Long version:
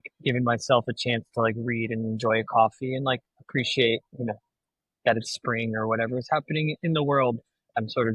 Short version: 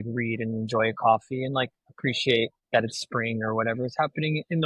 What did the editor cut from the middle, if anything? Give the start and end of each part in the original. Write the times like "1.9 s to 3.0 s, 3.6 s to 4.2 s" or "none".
4.1 s to 4.9 s